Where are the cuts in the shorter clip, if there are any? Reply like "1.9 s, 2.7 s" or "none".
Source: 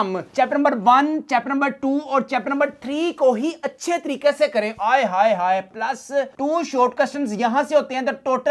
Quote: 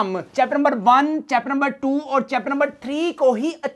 none